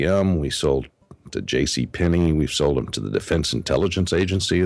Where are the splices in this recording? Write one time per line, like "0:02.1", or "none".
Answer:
none